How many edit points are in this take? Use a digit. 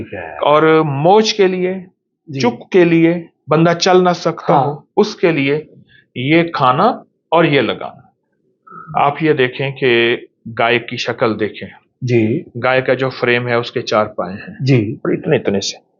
2